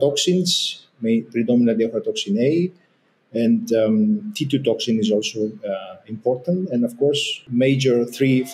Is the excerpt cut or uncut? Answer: cut